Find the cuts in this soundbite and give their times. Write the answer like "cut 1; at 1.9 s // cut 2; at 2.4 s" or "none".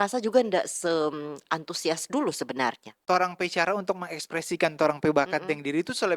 cut 1; at 3.0 s

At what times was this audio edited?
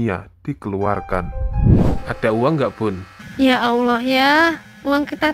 cut 1; at 1.8 s

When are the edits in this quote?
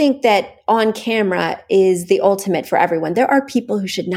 none

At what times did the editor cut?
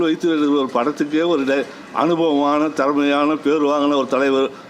none

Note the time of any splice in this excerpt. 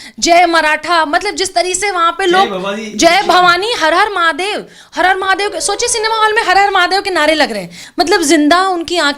cut 1; at 7.8 s

